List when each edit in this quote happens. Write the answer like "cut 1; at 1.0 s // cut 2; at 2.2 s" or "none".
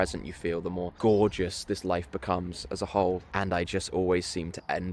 cut 1; at 0.9 s // cut 2; at 3.3 s